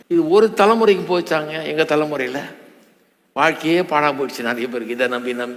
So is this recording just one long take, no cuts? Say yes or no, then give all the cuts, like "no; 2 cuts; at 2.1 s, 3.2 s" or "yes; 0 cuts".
yes; 0 cuts